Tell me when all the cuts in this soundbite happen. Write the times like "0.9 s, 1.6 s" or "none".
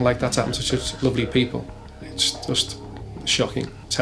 0.9 s